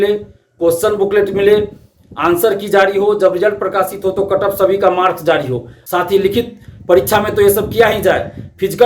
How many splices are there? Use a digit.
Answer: 1